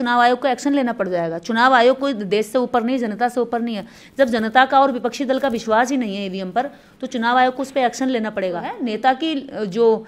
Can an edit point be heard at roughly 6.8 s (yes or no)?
no